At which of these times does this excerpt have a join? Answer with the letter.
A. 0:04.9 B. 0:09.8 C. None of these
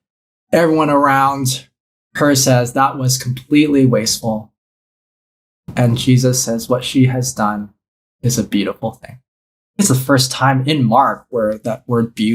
B